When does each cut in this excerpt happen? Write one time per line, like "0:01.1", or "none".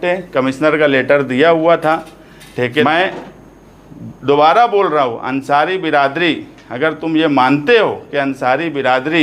0:02.8